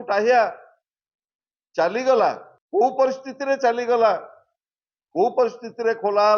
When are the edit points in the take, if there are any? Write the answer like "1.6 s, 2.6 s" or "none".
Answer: 2.5 s